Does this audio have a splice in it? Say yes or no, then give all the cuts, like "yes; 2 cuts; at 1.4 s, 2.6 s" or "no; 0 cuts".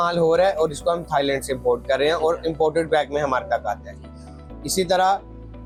no; 0 cuts